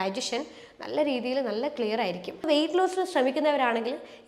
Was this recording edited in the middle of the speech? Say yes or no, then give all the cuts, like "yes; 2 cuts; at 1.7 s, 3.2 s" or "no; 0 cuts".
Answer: yes; 1 cut; at 2.4 s